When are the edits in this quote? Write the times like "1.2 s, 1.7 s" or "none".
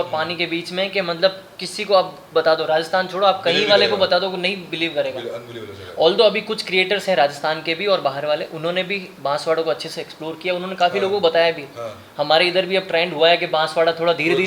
none

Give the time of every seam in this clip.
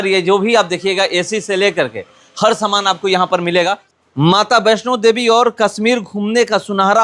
3.9 s

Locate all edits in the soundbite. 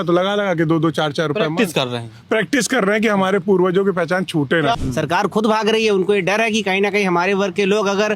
4.8 s

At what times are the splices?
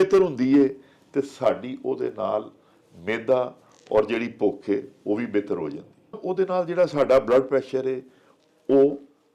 6.2 s

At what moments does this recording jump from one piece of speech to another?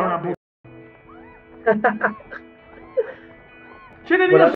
none

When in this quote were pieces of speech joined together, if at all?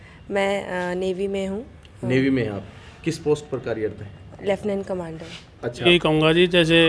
5.9 s

